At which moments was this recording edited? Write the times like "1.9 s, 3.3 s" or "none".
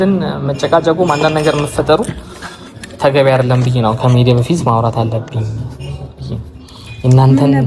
none